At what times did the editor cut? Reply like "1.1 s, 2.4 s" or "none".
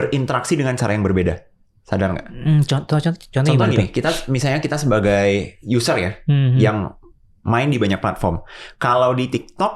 none